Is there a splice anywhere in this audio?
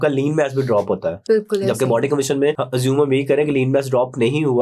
yes; 2 cuts; at 1.1 s, 2.6 s

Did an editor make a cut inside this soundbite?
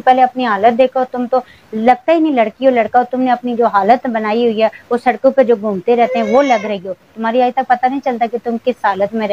no; 0 cuts

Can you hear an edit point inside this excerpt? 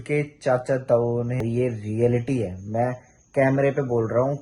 yes; 1 cut; at 1.4 s

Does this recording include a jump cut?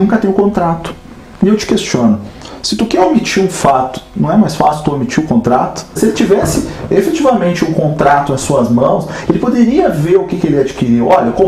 yes; 1 cut; at 6.0 s

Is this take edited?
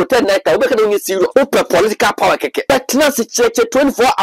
yes; 2 cuts; at 1.3 s, 2.7 s

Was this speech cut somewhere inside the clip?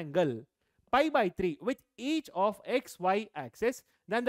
no; 0 cuts

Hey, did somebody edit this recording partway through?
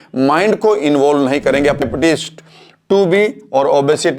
yes; 1 cut; at 1.8 s

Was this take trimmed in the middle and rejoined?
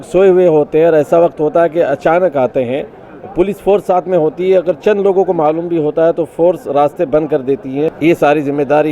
yes; 1 cut; at 7.9 s

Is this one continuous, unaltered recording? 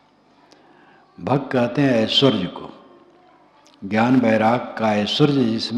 yes; 0 cuts

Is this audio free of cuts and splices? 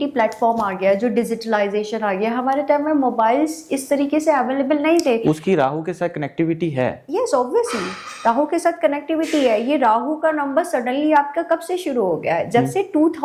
yes; 0 cuts

